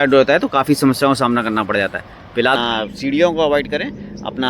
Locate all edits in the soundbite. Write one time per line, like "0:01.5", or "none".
0:02.6